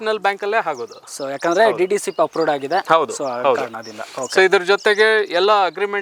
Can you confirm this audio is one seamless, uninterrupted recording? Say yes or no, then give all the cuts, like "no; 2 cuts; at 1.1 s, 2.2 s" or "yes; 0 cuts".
yes; 0 cuts